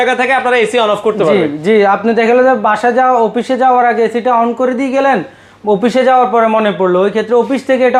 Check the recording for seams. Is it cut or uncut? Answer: uncut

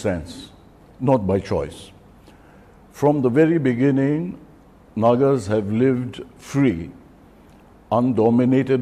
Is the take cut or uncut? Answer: uncut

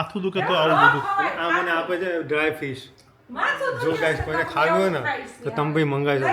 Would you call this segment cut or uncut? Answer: uncut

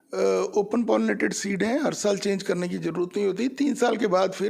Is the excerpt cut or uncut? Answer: uncut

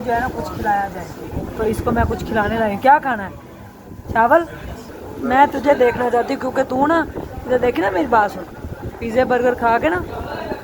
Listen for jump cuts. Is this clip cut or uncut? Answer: cut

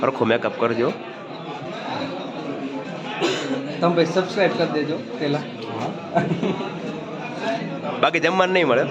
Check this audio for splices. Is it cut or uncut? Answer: uncut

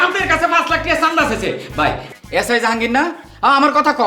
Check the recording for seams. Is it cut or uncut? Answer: cut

